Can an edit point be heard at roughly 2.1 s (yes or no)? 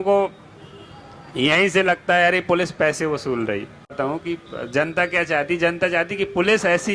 no